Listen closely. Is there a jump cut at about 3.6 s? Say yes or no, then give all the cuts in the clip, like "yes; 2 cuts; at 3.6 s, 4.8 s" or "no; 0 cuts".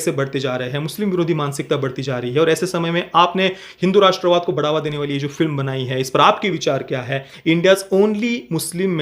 no; 1 cut; at 7.2 s